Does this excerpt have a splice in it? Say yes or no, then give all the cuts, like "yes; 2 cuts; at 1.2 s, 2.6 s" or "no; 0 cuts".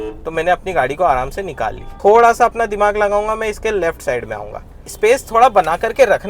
yes; 2 cuts; at 1.8 s, 4.9 s